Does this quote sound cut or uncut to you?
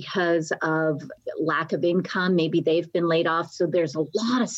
cut